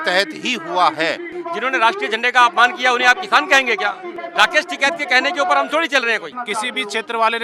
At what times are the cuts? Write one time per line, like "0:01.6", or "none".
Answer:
0:01.3
0:04.1
0:06.3